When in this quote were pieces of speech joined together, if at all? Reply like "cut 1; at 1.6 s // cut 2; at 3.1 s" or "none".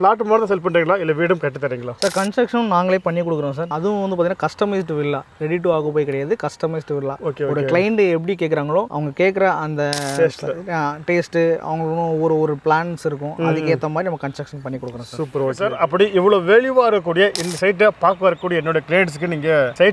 cut 1; at 15.7 s